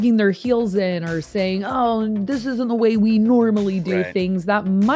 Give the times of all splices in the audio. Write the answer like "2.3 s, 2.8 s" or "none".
none